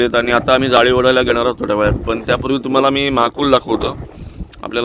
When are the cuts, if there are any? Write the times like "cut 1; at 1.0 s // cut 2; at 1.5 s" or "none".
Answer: none